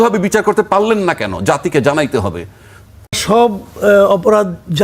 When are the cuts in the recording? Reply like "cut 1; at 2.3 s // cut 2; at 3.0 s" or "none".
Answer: cut 1; at 3.1 s